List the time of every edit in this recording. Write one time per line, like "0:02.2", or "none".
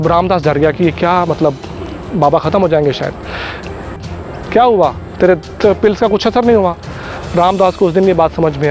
0:04.0